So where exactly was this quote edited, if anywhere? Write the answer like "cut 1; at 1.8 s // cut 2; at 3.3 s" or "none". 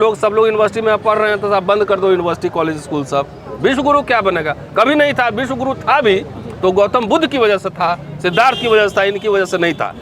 none

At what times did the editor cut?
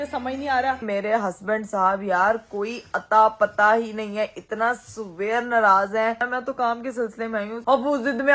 cut 1; at 0.8 s // cut 2; at 6.3 s // cut 3; at 7.6 s

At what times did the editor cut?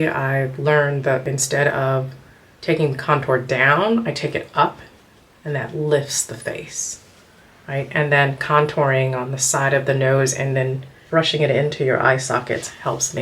cut 1; at 1.3 s // cut 2; at 10.9 s

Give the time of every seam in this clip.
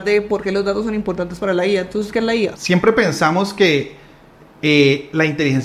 cut 1; at 2.6 s

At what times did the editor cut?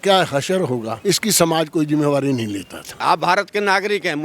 cut 1; at 0.9 s // cut 2; at 3.0 s

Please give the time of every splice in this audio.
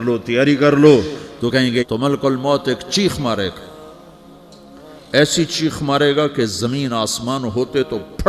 cut 1; at 1.8 s

